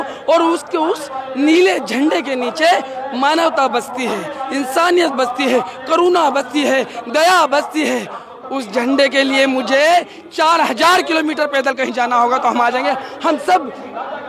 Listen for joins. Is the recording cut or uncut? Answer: uncut